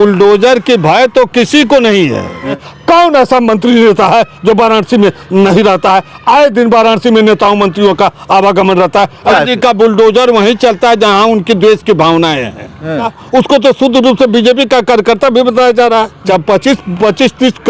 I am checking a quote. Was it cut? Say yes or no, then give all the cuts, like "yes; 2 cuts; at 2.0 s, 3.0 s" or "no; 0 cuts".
yes; 4 cuts; at 2.7 s, 9.3 s, 13.2 s, 16.2 s